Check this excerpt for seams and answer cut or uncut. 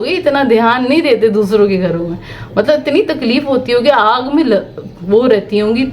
uncut